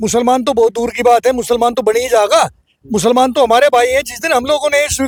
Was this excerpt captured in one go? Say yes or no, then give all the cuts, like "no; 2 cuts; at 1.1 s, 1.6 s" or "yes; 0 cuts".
yes; 0 cuts